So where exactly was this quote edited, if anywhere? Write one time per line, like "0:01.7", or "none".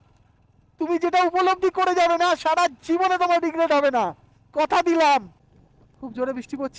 0:05.3